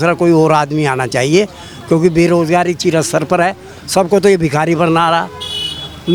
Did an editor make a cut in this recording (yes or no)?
no